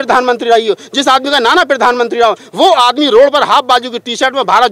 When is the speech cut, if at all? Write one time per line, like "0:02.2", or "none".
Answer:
none